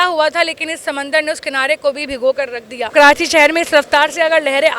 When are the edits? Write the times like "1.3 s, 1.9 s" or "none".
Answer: 2.9 s